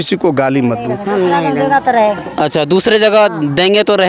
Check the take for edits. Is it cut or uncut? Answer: cut